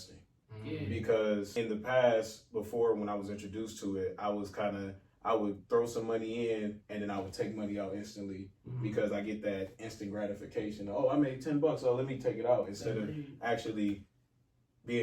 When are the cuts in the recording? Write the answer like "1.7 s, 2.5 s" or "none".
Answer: 1.5 s